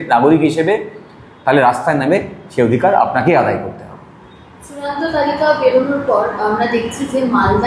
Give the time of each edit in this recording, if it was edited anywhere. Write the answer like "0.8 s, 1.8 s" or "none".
none